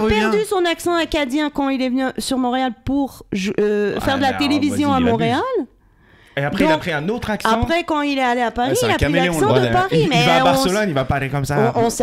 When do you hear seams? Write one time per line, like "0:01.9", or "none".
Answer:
none